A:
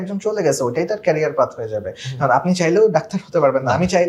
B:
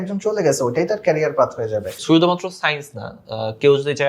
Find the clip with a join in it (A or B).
B